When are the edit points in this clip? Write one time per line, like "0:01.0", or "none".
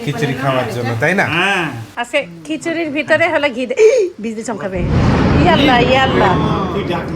none